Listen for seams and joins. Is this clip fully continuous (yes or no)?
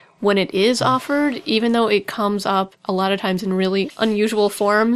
no